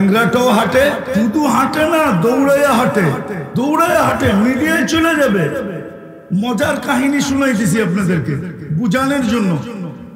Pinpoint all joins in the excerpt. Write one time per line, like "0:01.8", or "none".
0:01.0
0:03.3